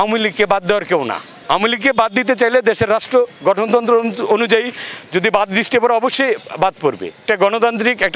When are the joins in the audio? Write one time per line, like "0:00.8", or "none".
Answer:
0:01.3
0:07.2